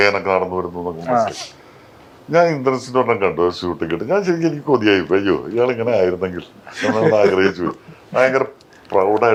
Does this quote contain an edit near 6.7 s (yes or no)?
no